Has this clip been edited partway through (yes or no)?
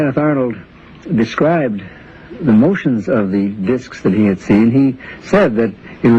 yes